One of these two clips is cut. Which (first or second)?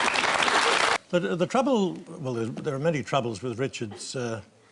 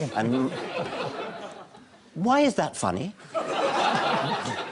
first